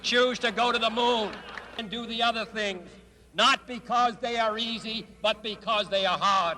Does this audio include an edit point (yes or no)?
no